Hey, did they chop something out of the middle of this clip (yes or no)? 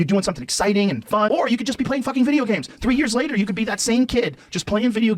yes